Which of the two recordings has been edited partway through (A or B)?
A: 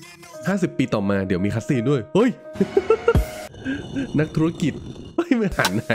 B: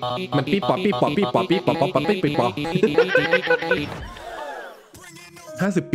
B